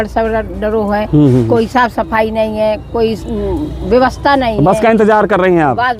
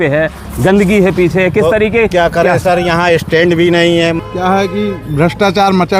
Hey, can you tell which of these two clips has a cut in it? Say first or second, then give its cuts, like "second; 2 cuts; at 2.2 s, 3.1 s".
second; 1 cut; at 4.2 s